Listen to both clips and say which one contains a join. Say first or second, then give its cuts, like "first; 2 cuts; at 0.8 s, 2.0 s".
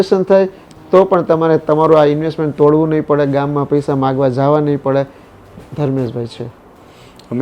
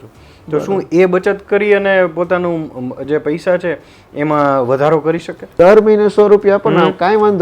second; 1 cut; at 5.4 s